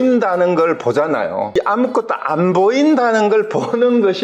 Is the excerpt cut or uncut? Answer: cut